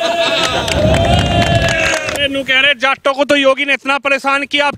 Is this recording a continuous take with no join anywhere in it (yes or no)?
no